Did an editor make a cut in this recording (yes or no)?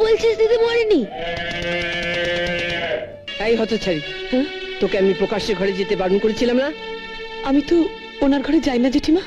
yes